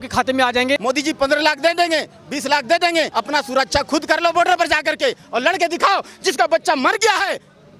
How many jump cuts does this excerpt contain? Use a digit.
2